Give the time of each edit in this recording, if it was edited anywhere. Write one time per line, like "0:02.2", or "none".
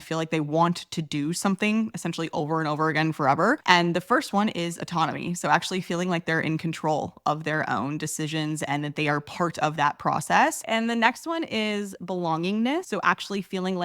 0:03.6
0:10.6
0:12.9